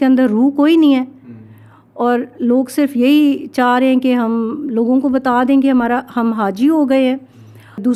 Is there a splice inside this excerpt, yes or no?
no